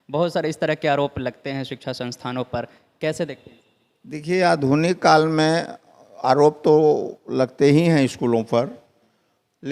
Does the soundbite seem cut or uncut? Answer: uncut